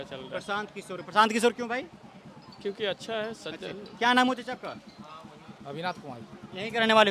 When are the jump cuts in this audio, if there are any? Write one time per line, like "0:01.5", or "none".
none